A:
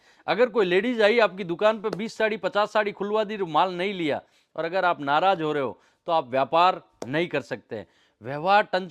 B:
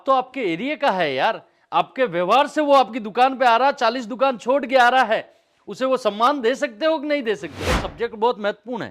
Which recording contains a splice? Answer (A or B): B